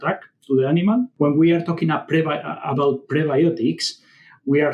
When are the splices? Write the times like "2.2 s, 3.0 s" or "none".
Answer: 1.1 s